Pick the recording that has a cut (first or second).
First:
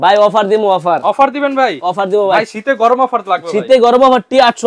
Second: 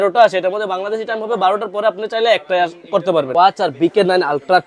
second